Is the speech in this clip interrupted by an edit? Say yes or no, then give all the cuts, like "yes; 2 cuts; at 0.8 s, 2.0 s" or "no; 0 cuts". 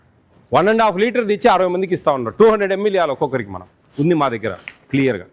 no; 0 cuts